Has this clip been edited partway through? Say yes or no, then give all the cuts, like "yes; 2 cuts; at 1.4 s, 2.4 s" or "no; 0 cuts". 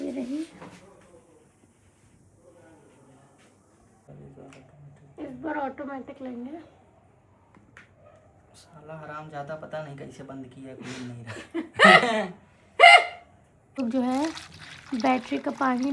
yes; 2 cuts; at 4.1 s, 13.8 s